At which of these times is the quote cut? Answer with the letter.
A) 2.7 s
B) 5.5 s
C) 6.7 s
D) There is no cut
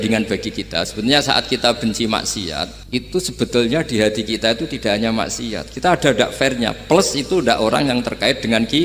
A